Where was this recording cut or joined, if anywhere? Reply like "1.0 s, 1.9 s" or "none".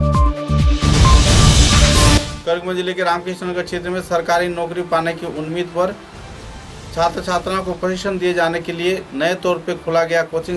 2.3 s